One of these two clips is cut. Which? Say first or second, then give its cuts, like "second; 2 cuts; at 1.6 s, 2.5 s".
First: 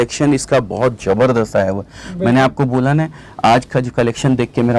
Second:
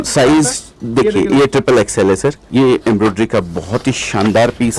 second; 1 cut; at 2.4 s